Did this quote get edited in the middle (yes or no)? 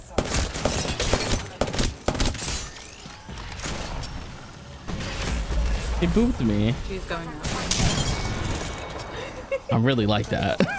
no